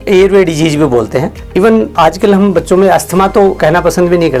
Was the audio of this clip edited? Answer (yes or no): no